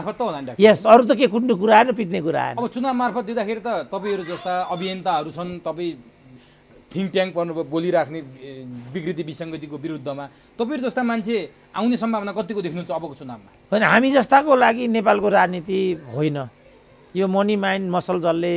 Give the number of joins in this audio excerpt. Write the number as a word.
zero